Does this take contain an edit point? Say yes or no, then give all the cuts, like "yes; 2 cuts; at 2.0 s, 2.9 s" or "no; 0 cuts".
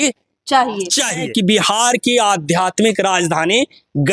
yes; 1 cut; at 1.2 s